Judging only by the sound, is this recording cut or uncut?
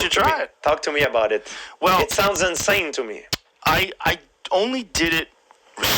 cut